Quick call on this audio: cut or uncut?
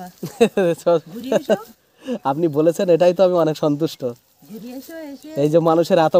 uncut